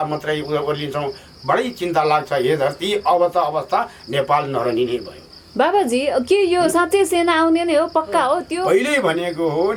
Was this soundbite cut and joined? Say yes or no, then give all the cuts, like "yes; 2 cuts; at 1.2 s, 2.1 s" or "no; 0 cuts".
no; 0 cuts